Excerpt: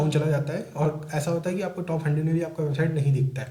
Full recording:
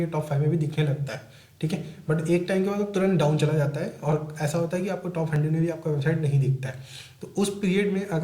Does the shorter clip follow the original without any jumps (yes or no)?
yes